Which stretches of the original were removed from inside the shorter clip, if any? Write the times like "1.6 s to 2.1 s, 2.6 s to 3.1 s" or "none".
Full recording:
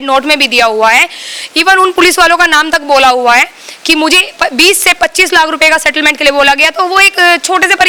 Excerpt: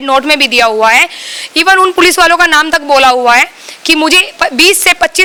none